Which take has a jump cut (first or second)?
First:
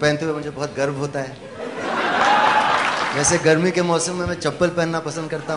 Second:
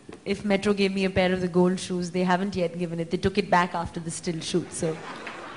first